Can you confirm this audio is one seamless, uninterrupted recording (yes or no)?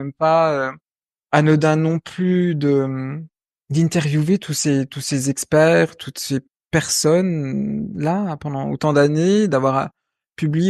yes